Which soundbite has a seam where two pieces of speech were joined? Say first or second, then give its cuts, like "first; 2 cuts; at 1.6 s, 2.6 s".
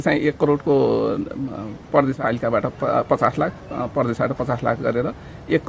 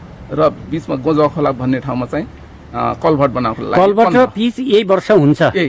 first; 1 cut; at 2.2 s